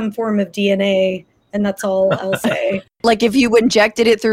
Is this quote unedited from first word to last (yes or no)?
no